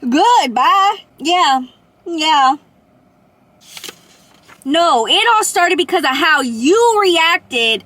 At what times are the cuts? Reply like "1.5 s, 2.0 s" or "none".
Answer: 1.1 s, 4.5 s